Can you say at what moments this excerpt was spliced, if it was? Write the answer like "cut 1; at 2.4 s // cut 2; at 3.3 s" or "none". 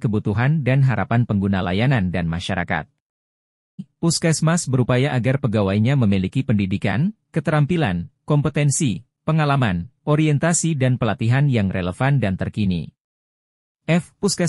cut 1; at 3.9 s